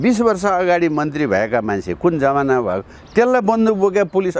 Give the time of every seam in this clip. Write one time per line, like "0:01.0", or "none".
none